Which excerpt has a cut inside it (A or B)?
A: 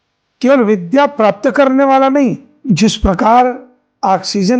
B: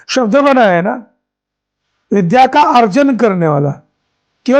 A